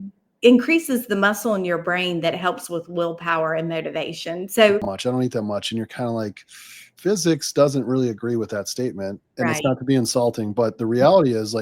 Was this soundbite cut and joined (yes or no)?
yes